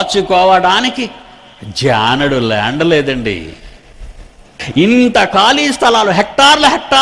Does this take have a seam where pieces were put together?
yes; 1 cut; at 4.6 s

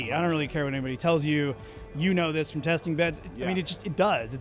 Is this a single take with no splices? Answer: yes; 0 cuts

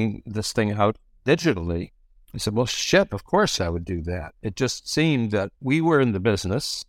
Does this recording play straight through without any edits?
no; 2 cuts; at 3.6 s, 5.5 s

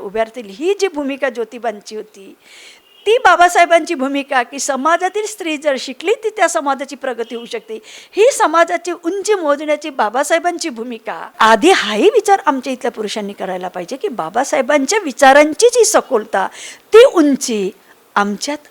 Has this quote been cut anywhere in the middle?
yes; 1 cut; at 11.3 s

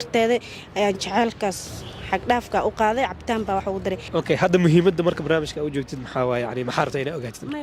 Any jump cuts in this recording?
yes; 1 cut; at 4.0 s

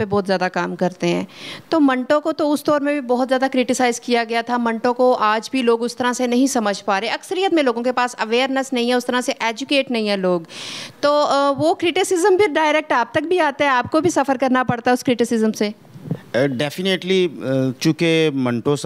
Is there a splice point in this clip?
no; 0 cuts

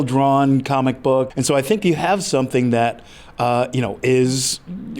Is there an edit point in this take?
yes; 1 cut; at 1.3 s

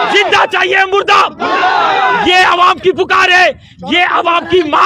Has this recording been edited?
no; 0 cuts

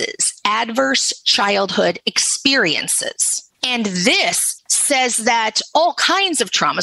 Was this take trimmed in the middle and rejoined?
no; 0 cuts

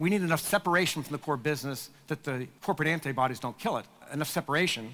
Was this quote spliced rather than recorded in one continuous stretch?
yes; 2 cuts; at 2.5 s, 4.0 s

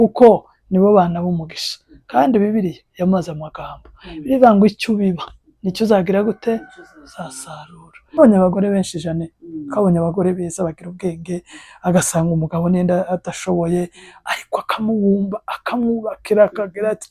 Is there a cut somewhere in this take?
yes; 1 cut; at 8.2 s

